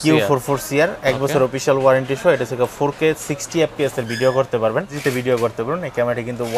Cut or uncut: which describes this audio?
cut